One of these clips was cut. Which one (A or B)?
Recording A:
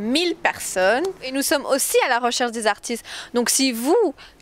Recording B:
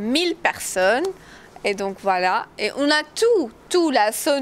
A